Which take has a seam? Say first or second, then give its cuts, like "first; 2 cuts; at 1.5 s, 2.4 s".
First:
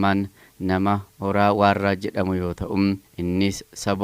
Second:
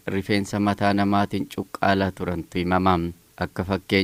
first; 1 cut; at 3.1 s